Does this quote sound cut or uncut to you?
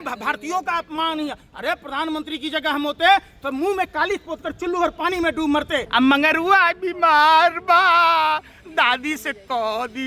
cut